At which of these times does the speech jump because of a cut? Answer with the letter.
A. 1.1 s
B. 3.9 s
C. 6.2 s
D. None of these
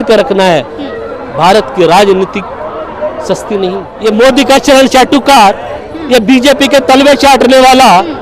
B